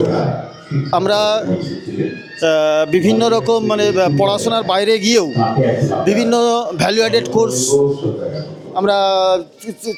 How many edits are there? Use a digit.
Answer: 0